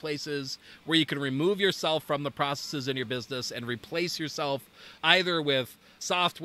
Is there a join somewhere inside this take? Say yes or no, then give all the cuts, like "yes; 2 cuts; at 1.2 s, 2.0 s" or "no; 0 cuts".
no; 0 cuts